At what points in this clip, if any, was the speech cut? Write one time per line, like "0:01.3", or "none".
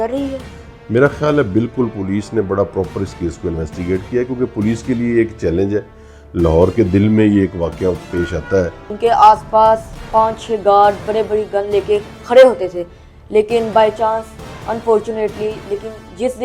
0:08.9